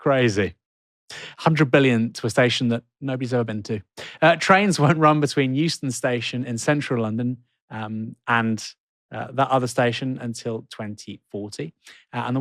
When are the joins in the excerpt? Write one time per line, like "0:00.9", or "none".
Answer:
none